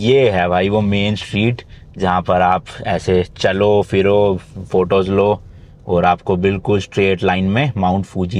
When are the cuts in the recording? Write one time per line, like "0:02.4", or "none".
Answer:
none